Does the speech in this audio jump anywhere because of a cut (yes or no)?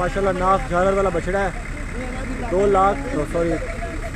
no